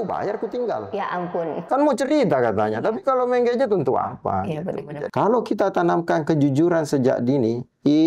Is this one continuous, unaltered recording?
no; 1 cut; at 5.0 s

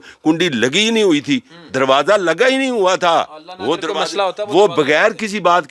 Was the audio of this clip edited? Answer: no; 0 cuts

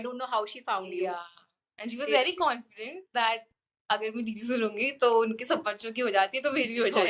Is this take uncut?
yes; 0 cuts

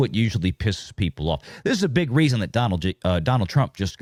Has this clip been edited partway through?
no; 0 cuts

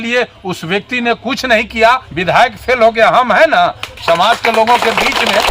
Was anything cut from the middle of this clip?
yes; 1 cut; at 2.1 s

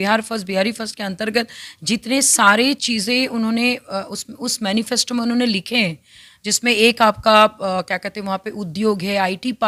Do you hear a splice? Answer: no; 0 cuts

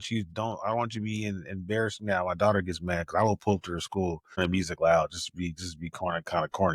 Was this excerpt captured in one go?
no; 1 cut; at 4.4 s

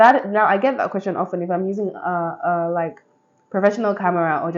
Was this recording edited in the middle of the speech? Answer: no; 0 cuts

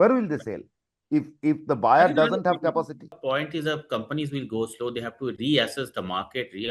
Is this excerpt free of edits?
no; 1 cut; at 3.2 s

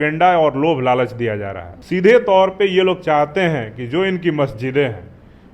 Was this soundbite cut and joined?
yes; 1 cut; at 1.7 s

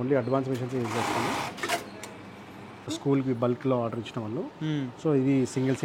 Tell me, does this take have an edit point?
yes; 1 cut; at 2.9 s

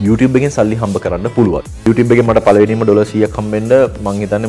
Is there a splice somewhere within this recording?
yes; 1 cut; at 1.7 s

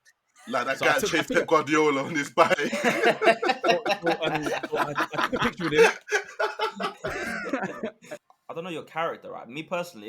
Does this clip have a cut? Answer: yes; 1 cut; at 8.3 s

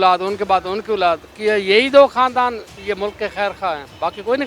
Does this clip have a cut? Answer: yes; 1 cut; at 2.7 s

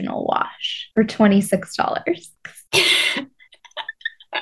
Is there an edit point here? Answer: yes; 1 cut; at 2.3 s

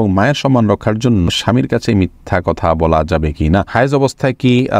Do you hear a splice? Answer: yes; 2 cuts; at 1.3 s, 3.7 s

